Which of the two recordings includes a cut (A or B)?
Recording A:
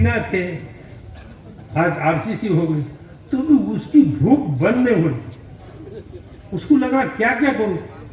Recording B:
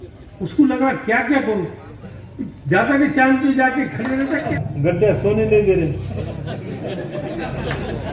B